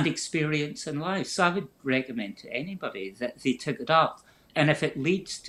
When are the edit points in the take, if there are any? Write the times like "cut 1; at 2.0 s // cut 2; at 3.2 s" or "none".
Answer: cut 1; at 4.5 s